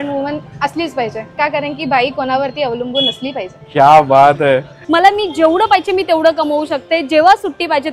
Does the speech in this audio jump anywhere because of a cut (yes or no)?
yes